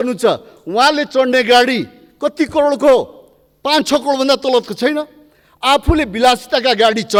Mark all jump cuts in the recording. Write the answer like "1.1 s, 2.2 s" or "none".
none